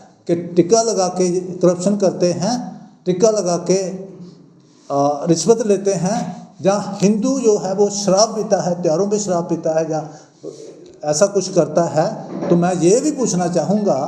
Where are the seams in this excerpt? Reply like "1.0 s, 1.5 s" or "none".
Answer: none